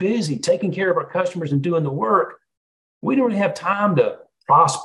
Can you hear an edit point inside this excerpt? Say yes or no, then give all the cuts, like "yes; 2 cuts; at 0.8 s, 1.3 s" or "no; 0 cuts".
no; 0 cuts